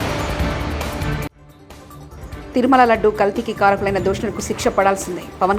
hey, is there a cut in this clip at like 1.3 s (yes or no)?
yes